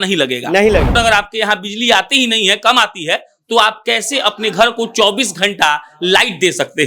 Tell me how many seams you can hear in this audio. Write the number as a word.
one